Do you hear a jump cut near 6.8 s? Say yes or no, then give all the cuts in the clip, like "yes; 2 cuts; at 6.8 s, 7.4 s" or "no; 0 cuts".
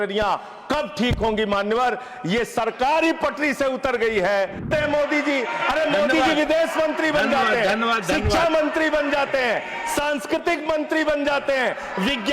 no; 1 cut; at 4.7 s